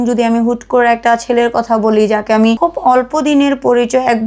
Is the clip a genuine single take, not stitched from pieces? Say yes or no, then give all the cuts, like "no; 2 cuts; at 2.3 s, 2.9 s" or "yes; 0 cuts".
no; 1 cut; at 2.6 s